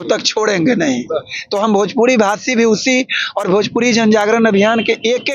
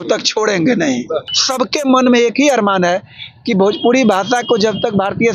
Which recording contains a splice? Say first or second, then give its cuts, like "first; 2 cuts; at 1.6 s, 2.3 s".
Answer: second; 1 cut; at 1.3 s